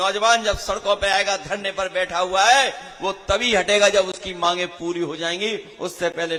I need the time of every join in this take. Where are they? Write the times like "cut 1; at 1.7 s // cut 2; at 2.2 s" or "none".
none